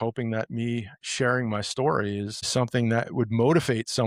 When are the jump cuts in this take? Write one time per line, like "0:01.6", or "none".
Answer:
0:02.4